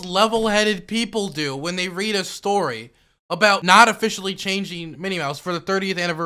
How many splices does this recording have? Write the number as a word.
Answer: one